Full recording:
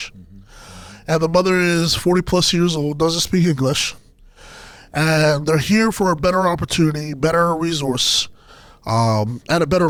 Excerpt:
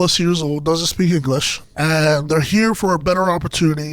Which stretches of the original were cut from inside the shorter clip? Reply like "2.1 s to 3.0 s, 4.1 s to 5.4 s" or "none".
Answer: 3.9 s to 4.8 s